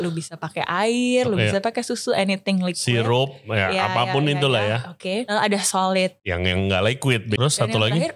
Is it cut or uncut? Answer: cut